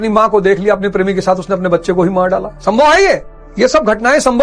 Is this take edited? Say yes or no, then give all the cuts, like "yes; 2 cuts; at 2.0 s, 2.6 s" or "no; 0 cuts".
no; 0 cuts